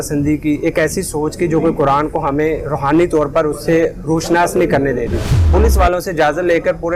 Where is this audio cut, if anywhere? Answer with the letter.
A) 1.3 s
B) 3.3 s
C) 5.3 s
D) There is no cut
C